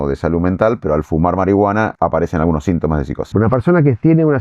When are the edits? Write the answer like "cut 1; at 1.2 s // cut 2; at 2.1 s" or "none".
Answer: cut 1; at 1.9 s // cut 2; at 3.2 s

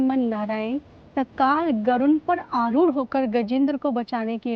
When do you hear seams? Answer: none

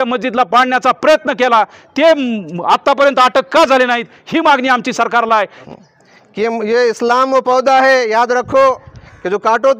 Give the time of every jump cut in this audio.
cut 1; at 5.6 s

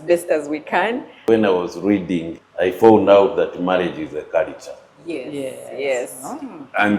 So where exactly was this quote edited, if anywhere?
cut 1; at 1.2 s // cut 2; at 2.4 s

